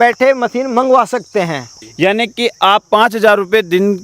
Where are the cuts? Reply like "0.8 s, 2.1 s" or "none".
1.7 s